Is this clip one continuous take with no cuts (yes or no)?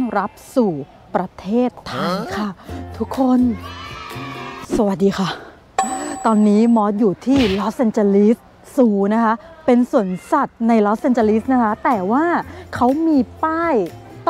yes